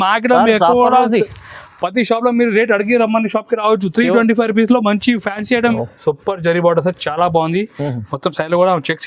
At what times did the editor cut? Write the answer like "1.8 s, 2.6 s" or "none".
5.7 s